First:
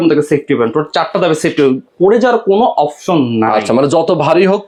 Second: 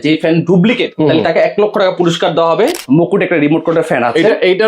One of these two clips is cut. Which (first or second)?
second